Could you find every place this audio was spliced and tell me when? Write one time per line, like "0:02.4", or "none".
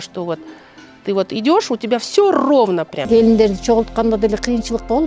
0:03.0